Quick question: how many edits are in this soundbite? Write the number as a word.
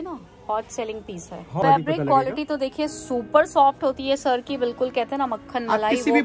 one